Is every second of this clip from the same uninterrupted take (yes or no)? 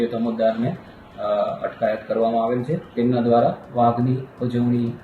no